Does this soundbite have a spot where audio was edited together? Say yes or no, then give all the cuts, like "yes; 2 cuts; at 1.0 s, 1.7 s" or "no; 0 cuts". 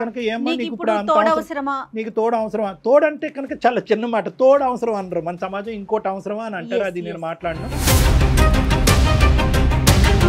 no; 0 cuts